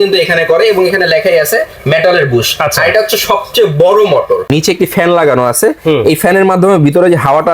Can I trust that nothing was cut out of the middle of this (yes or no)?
no